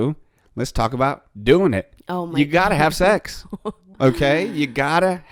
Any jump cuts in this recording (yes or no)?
no